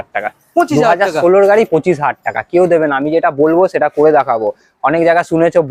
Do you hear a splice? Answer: no; 0 cuts

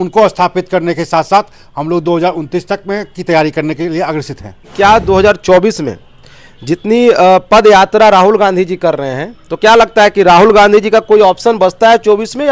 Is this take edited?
yes; 1 cut; at 4.6 s

